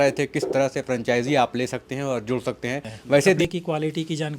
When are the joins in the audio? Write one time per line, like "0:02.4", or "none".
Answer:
0:03.4